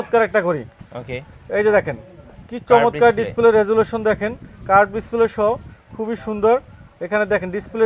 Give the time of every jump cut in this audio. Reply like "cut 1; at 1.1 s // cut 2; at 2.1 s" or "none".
none